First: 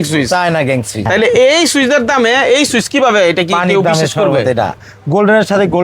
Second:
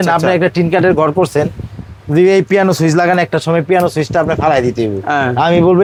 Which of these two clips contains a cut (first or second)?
first